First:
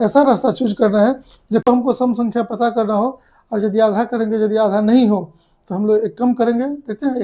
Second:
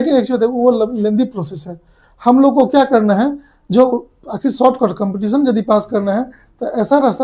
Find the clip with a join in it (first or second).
first